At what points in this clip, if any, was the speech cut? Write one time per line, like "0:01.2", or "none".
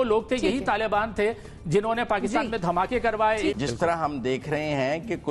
0:03.6